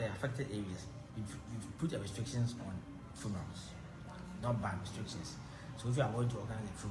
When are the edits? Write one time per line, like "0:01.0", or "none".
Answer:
0:01.0